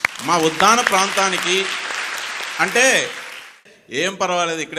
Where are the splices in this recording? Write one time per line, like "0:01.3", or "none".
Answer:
none